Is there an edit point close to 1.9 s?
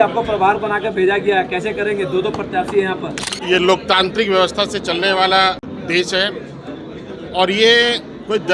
no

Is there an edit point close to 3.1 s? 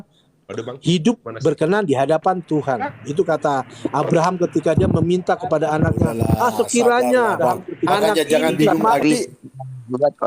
no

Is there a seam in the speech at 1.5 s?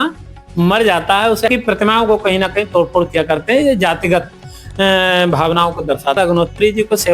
yes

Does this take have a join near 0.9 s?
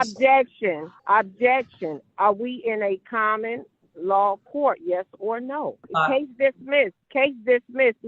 yes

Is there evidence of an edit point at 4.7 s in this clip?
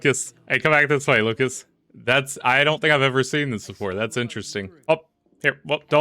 yes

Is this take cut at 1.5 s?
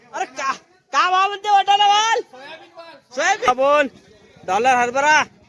no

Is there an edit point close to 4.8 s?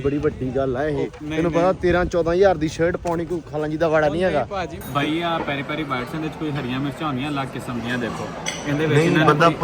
yes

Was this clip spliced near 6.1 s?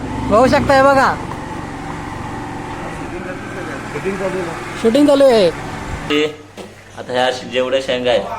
yes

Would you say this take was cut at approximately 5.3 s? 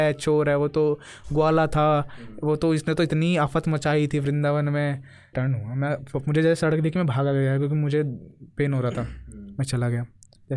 yes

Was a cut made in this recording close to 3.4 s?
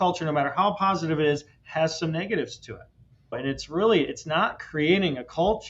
yes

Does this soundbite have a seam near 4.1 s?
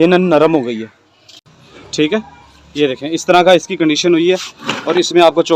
no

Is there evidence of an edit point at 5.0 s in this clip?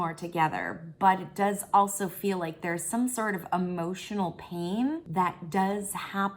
yes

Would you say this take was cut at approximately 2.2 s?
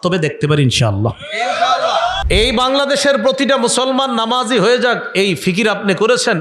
yes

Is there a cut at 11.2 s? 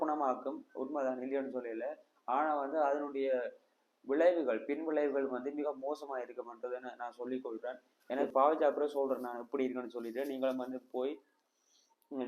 no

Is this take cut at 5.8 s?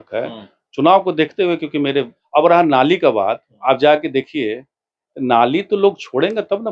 no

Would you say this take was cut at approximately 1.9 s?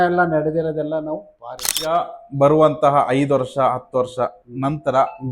yes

